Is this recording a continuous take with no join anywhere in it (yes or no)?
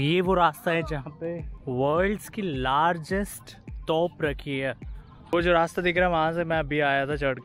no